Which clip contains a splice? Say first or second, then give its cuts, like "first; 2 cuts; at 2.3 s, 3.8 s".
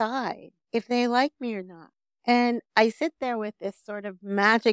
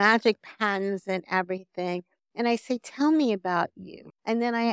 first; 1 cut; at 2.1 s